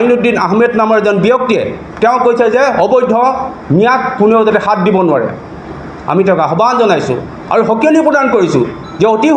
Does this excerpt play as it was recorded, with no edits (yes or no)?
yes